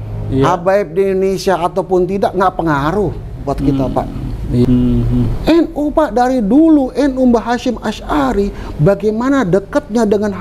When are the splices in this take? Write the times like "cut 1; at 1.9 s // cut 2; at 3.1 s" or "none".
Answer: cut 1; at 4.6 s

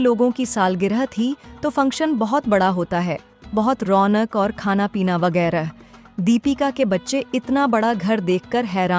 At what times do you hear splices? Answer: none

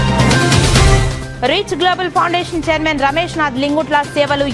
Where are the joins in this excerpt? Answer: cut 1; at 1.2 s

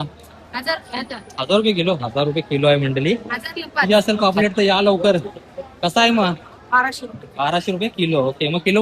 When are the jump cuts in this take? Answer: cut 1; at 3.9 s

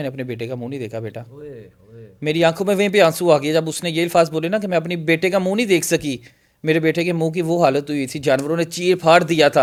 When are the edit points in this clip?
none

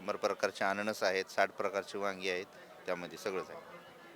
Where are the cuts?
none

